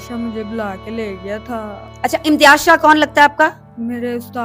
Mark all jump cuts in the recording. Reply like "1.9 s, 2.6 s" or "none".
none